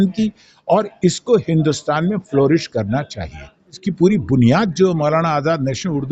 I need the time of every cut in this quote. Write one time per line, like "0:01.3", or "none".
0:03.8